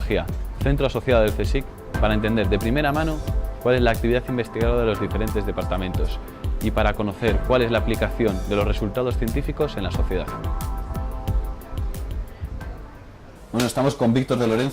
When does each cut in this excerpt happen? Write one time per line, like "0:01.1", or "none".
0:13.7